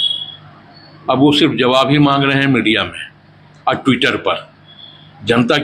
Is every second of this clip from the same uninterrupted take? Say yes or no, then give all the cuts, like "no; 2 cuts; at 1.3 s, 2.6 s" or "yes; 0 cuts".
yes; 0 cuts